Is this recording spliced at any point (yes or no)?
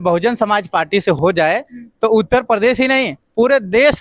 yes